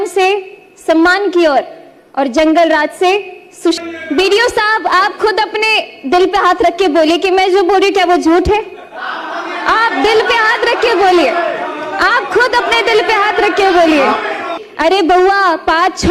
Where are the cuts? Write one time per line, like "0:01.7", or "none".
0:03.8
0:14.6